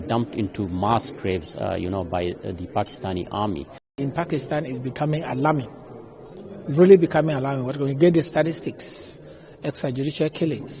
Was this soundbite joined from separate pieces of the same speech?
yes; 1 cut; at 4.0 s

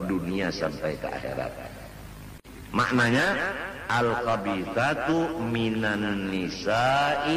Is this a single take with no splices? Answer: no; 1 cut; at 2.4 s

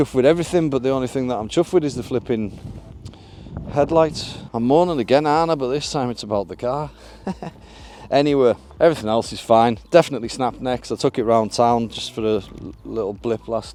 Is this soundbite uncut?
yes; 0 cuts

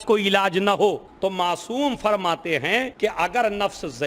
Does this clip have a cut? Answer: yes; 2 cuts; at 1.1 s, 2.9 s

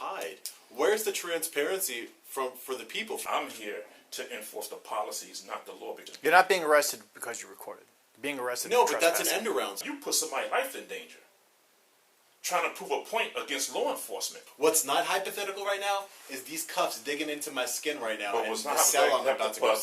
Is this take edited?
yes; 4 cuts; at 3.2 s, 6.1 s, 9.8 s, 14.5 s

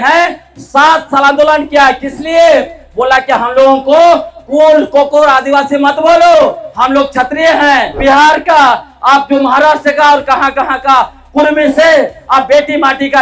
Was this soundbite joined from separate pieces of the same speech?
yes; 1 cut; at 7.9 s

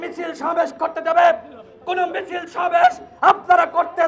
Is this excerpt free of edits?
yes; 0 cuts

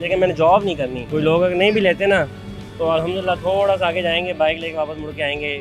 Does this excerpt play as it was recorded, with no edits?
no; 1 cut; at 1.0 s

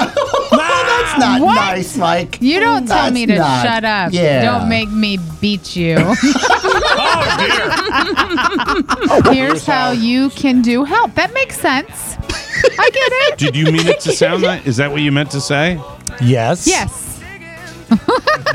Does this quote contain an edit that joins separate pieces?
yes; 1 cut; at 9.2 s

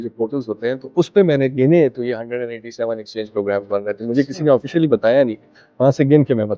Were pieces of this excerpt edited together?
no; 0 cuts

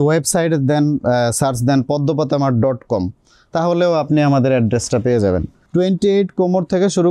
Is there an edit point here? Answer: yes; 1 cut; at 5.6 s

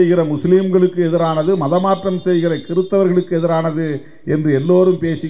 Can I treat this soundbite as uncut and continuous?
yes; 0 cuts

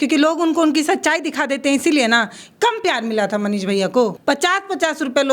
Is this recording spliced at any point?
yes; 1 cut; at 4.2 s

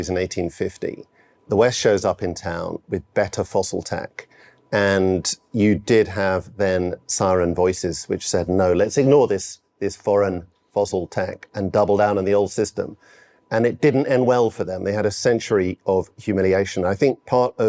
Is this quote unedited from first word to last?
no; 1 cut; at 1.4 s

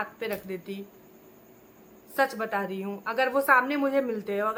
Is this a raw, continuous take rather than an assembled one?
yes; 0 cuts

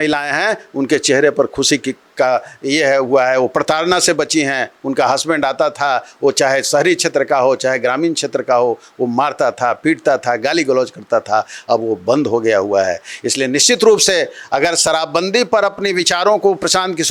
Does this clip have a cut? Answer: no; 0 cuts

